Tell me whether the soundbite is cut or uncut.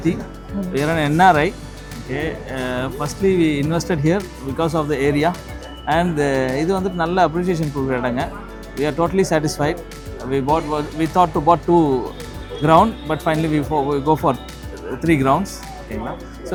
uncut